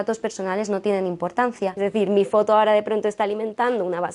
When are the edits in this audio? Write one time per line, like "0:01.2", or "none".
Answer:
0:01.7

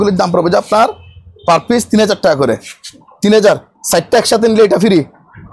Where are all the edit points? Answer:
none

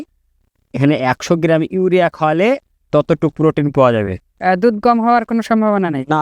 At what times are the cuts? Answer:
0:04.3

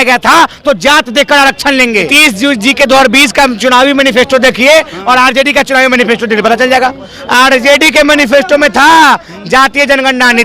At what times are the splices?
0:02.1

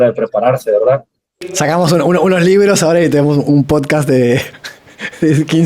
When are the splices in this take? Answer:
0:01.5

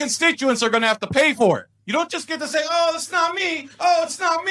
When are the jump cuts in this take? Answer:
0:01.7

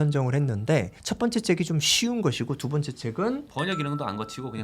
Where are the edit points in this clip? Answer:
0:01.0
0:03.5

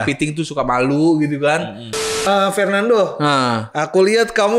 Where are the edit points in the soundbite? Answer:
0:02.2

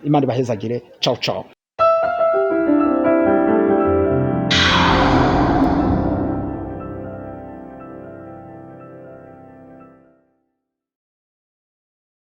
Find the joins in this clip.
none

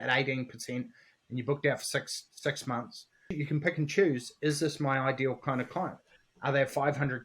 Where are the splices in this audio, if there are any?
0:03.4

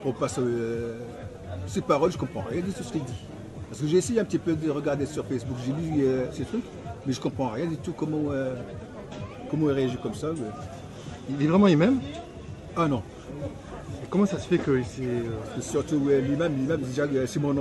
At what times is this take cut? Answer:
0:06.1

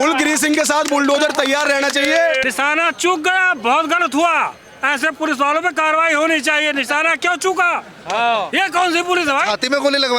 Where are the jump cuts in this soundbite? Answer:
0:02.4

